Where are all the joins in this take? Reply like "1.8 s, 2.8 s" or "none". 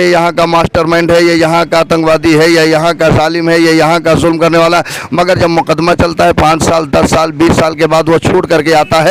none